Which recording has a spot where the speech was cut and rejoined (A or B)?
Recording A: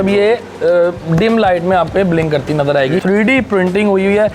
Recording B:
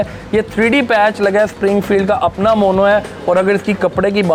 A